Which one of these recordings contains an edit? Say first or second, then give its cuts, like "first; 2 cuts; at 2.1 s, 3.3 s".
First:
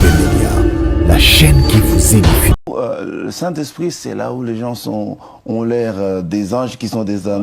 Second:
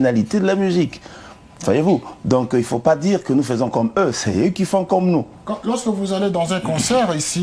first; 1 cut; at 2.6 s